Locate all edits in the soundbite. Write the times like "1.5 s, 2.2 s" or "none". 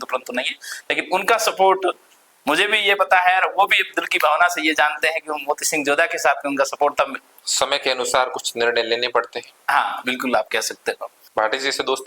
7.3 s, 11.1 s